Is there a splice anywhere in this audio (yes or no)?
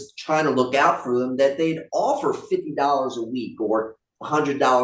no